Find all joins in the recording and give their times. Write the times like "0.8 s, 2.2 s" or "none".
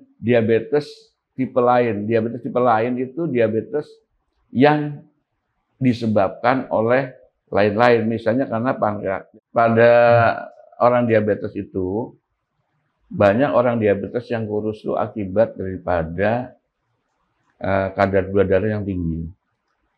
9.2 s